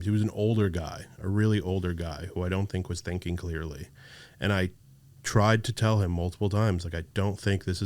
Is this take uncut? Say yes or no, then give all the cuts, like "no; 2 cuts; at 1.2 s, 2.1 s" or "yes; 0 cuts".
yes; 0 cuts